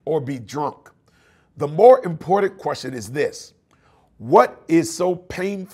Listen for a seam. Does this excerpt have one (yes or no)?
no